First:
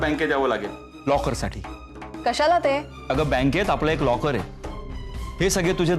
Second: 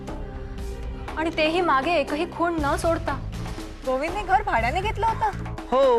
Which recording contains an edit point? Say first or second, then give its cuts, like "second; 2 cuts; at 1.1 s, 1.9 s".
first; 1 cut; at 2.9 s